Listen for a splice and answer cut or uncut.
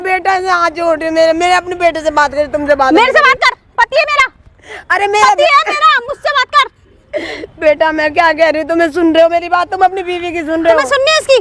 uncut